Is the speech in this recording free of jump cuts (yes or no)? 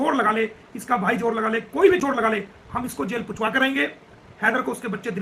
yes